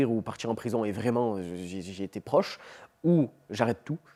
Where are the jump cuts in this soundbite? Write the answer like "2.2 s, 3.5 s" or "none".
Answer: none